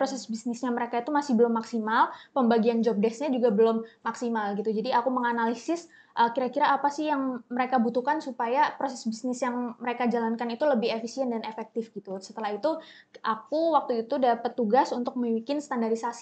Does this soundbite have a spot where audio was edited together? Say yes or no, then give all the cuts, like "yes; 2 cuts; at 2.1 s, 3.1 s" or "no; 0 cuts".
no; 0 cuts